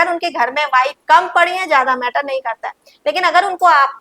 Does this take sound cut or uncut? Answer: cut